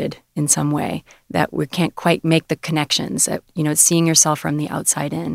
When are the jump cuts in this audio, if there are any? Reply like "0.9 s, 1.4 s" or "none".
3.5 s